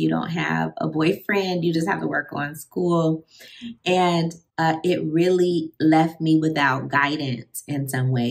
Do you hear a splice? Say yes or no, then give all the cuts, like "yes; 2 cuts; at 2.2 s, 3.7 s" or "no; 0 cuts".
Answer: yes; 1 cut; at 4.4 s